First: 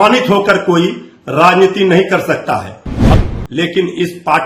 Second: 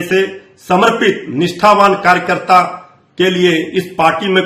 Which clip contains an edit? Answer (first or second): first